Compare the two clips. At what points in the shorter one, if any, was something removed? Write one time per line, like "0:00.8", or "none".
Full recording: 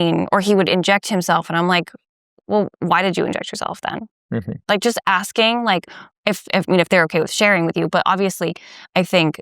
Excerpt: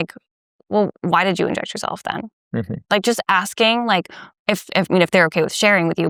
none